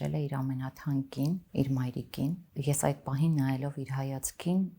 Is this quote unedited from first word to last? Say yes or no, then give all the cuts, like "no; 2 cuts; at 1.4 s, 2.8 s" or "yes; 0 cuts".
no; 2 cuts; at 1.5 s, 2.4 s